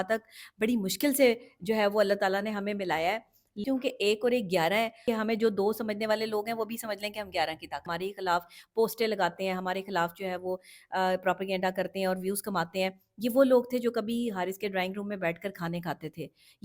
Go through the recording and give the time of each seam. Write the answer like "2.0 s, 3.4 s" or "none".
3.6 s, 5.0 s, 7.9 s